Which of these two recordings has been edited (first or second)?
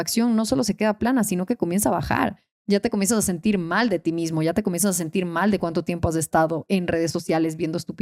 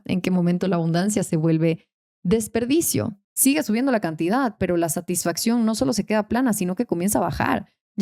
second